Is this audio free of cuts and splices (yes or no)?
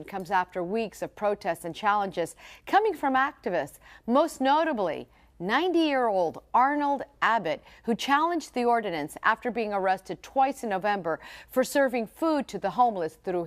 no